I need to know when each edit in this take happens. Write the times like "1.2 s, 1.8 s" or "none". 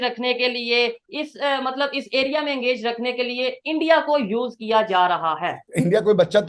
none